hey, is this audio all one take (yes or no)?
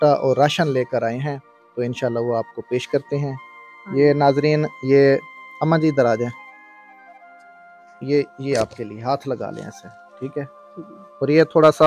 yes